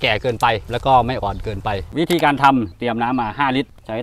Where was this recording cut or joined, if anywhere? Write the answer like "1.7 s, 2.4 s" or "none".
1.8 s, 2.7 s